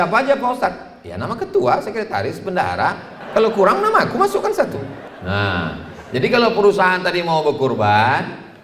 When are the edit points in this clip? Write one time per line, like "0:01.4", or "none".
0:03.1
0:05.1